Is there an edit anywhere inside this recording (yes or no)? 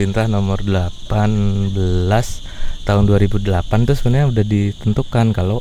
no